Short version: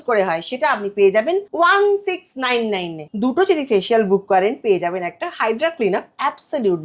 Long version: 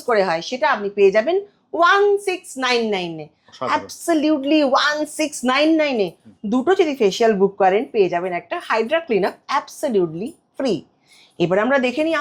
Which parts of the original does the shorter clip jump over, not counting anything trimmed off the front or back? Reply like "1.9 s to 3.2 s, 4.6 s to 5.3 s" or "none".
1.5 s to 1.7 s, 3.2 s to 6.3 s